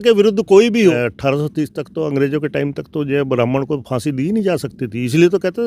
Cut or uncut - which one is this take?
cut